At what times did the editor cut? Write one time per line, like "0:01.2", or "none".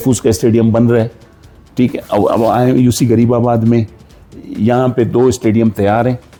none